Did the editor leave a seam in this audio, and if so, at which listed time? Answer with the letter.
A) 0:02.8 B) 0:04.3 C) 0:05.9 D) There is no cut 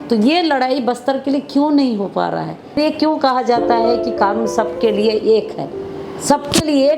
A